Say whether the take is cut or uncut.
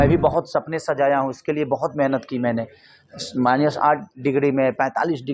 uncut